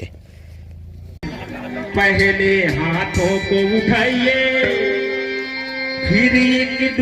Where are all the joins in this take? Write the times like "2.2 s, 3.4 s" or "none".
1.2 s